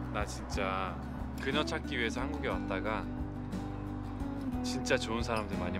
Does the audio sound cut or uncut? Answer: uncut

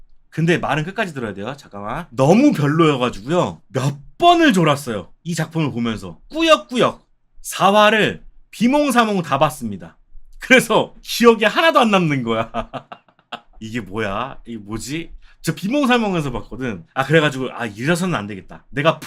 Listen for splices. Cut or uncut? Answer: cut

